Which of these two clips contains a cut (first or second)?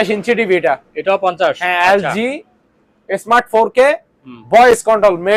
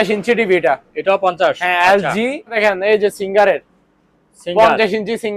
second